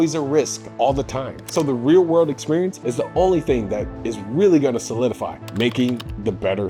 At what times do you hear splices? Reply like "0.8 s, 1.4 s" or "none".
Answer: none